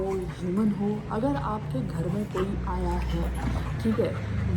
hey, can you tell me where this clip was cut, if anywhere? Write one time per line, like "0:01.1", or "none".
none